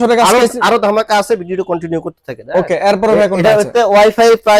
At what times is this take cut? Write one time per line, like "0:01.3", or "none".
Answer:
none